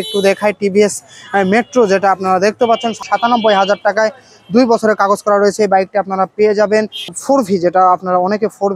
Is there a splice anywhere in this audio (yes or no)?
yes